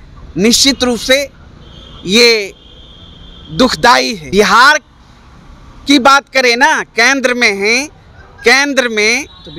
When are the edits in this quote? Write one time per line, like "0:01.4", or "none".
0:04.2